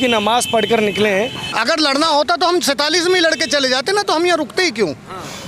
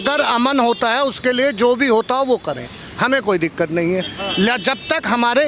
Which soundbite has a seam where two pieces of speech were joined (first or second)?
first